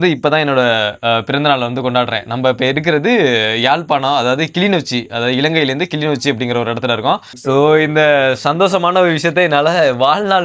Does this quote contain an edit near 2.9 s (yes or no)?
no